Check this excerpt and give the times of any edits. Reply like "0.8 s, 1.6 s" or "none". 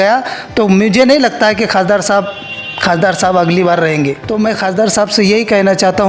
4.2 s